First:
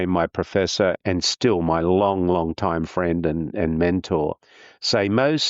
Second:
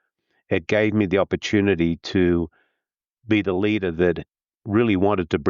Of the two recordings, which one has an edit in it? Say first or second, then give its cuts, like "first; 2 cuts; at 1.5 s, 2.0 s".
first; 1 cut; at 1.0 s